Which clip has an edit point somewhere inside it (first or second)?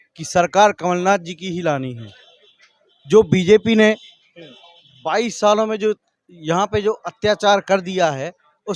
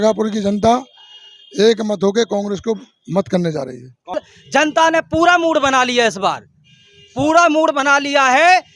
second